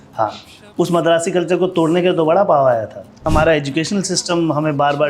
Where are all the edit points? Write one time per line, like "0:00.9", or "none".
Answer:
0:03.2